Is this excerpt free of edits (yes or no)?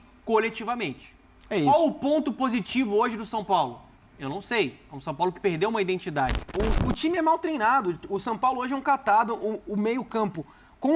no